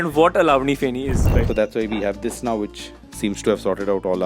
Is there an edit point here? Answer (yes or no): yes